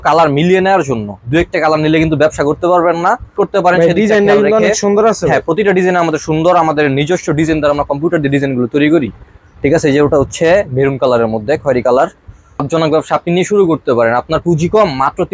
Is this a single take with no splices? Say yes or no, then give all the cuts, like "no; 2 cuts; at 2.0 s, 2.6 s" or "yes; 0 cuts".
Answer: no; 2 cuts; at 3.3 s, 12.7 s